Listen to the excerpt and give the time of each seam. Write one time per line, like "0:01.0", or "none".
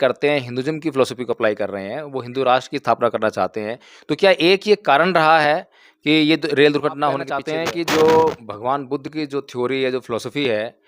0:07.4